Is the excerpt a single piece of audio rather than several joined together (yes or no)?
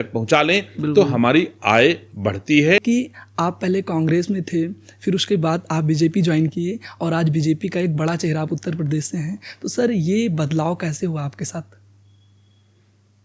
no